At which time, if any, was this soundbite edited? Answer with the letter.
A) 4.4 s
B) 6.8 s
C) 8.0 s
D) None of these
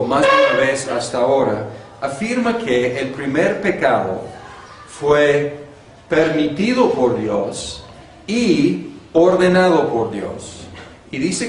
B